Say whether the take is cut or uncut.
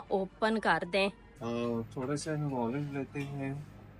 cut